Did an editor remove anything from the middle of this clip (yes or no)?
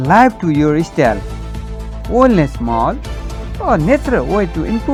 no